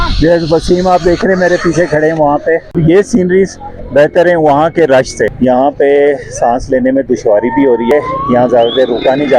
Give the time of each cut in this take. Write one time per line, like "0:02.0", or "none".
0:02.8
0:05.3
0:07.9